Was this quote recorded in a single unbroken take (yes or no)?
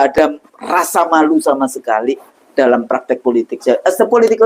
no